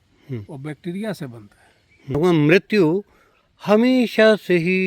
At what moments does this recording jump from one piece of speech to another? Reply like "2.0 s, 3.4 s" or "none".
2.2 s